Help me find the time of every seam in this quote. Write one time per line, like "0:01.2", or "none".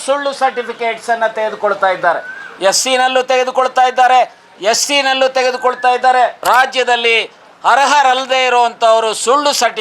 0:06.4